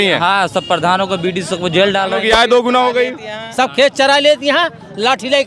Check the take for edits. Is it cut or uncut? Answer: cut